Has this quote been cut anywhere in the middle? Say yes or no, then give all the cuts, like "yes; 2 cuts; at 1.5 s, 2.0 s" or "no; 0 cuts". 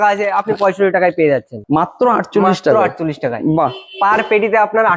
yes; 1 cut; at 1.5 s